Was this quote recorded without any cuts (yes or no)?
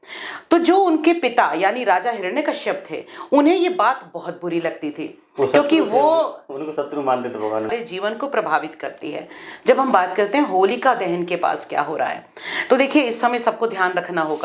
no